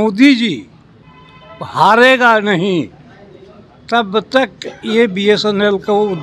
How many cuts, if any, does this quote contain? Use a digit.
0